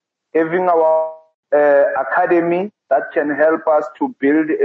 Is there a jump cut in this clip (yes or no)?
no